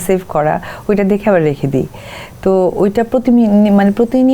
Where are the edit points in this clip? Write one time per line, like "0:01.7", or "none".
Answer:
none